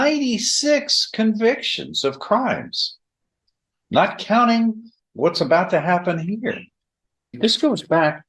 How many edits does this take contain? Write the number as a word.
one